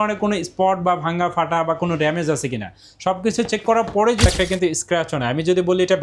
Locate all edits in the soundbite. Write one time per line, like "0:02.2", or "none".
0:04.3